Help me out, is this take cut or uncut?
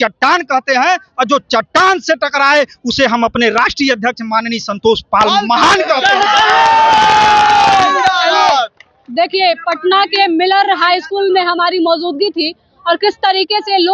uncut